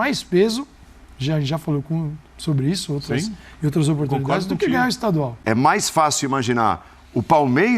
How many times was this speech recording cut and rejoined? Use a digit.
1